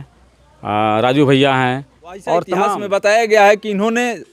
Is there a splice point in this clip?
yes; 1 cut; at 2.8 s

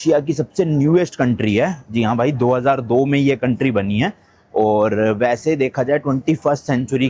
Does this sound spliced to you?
no; 0 cuts

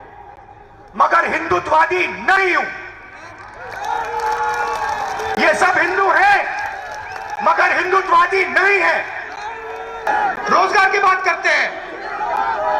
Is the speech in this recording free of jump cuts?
no; 1 cut; at 10.1 s

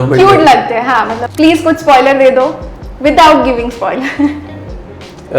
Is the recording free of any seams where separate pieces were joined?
no; 1 cut; at 1.2 s

